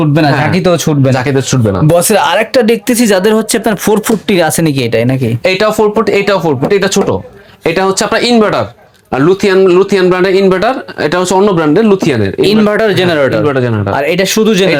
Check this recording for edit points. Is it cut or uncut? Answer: uncut